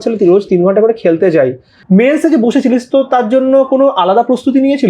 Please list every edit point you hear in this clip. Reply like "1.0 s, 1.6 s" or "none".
1.7 s